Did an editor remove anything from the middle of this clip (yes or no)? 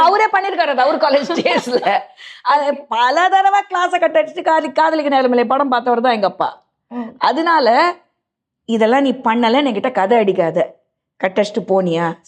no